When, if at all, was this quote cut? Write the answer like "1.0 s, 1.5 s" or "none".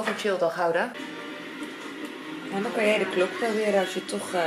0.9 s